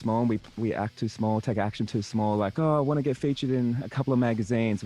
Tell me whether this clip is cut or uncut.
cut